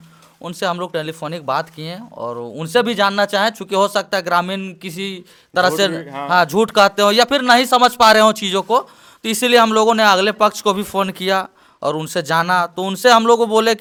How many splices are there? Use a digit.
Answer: 0